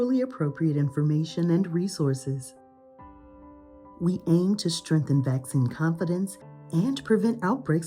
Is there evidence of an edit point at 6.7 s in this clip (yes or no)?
no